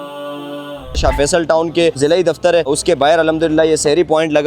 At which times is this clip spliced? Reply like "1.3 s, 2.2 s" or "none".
1.0 s